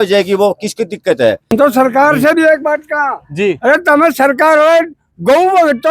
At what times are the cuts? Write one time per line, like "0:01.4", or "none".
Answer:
0:01.5